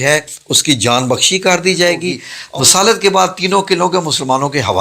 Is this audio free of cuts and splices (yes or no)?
no